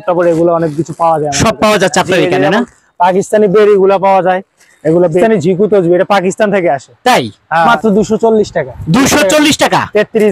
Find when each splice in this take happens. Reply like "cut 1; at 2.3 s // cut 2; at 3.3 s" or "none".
cut 1; at 5.2 s // cut 2; at 7.7 s